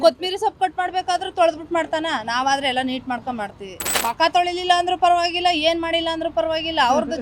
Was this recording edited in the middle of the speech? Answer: yes; 1 cut; at 3.9 s

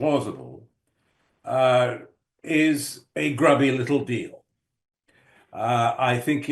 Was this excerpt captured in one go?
yes; 0 cuts

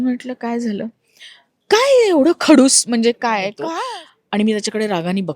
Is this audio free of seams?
no; 1 cut; at 3.6 s

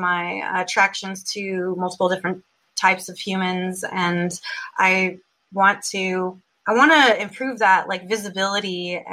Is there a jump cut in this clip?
yes; 1 cut; at 6.5 s

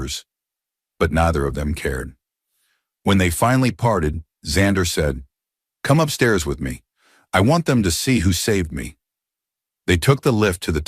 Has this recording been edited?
no; 0 cuts

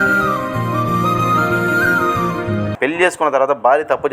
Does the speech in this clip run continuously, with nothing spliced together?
no; 1 cut; at 2.7 s

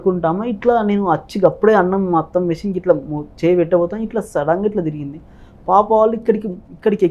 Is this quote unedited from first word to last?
yes; 0 cuts

